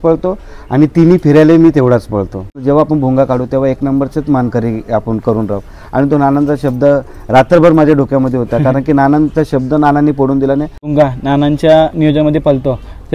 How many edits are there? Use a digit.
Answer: 2